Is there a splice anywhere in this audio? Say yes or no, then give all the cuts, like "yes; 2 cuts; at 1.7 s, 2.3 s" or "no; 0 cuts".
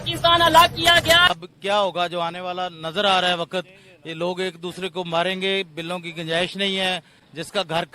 yes; 1 cut; at 1.3 s